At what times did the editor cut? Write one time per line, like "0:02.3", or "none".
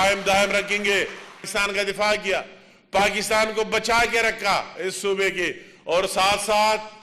0:01.4